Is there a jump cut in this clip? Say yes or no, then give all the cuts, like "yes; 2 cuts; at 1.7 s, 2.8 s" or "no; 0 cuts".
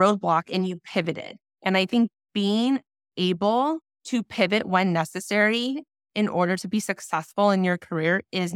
yes; 1 cut; at 3.9 s